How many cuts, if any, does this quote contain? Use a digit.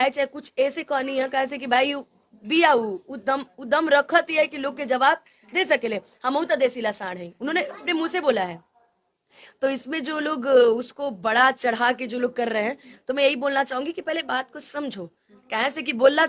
0